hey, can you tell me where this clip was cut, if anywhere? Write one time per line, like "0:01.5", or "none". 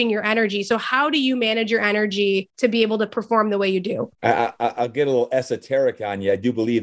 0:02.5
0:04.1